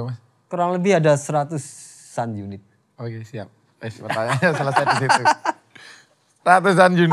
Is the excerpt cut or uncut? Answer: uncut